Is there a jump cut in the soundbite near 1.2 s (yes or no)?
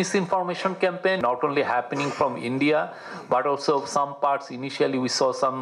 yes